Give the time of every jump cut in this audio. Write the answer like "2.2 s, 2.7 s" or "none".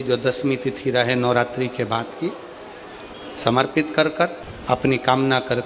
4.5 s